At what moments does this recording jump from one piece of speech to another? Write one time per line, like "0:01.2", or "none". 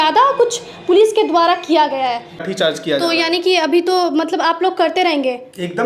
0:02.5